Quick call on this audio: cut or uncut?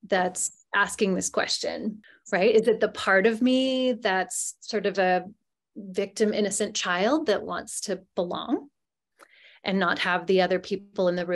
cut